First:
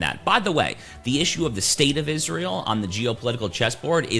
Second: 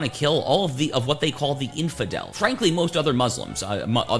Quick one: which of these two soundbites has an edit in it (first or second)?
second